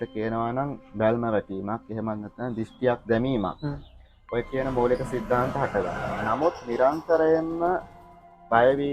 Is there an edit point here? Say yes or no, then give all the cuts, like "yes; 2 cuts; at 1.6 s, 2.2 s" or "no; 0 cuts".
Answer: no; 0 cuts